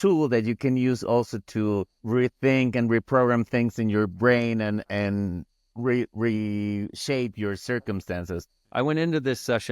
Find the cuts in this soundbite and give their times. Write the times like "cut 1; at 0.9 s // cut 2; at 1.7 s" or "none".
cut 1; at 2.0 s // cut 2; at 8.6 s

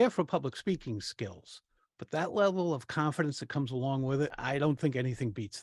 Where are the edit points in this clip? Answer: cut 1; at 4.4 s

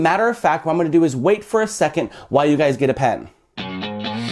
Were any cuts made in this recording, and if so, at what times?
cut 1; at 3.2 s

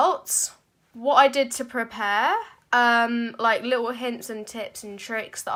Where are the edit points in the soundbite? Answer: none

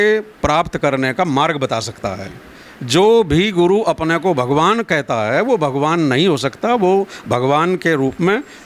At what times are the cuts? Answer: none

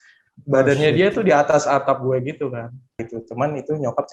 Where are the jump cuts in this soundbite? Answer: cut 1; at 3.0 s

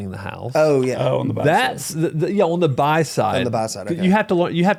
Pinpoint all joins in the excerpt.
none

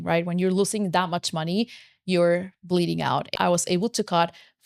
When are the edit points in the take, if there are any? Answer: cut 1; at 3.3 s

